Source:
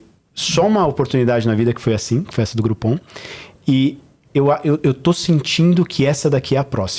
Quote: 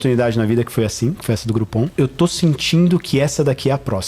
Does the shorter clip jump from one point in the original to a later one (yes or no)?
yes